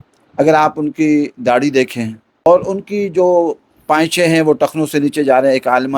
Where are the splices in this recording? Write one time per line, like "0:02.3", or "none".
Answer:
0:02.5